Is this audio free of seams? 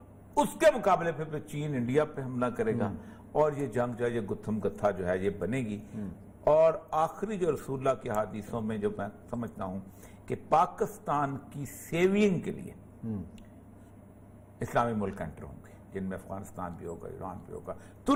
yes; 0 cuts

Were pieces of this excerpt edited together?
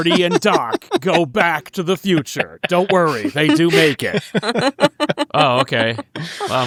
no; 0 cuts

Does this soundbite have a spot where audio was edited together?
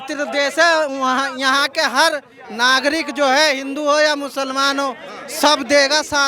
no; 0 cuts

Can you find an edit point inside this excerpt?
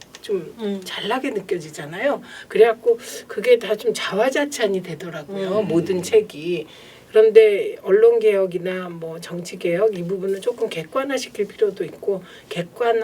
no; 0 cuts

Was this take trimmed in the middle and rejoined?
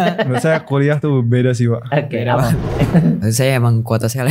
yes; 1 cut; at 2.6 s

